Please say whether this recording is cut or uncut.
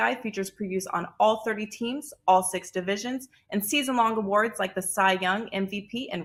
uncut